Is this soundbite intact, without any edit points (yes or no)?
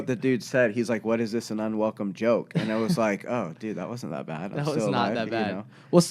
yes